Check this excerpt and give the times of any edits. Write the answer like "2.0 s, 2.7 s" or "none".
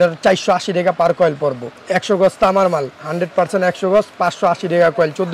1.8 s